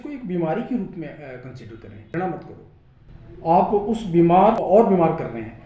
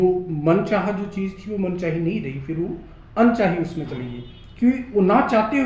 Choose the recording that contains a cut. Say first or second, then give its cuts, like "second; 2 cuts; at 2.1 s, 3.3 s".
first; 2 cuts; at 2.0 s, 4.6 s